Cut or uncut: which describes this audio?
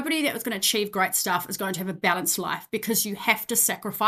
uncut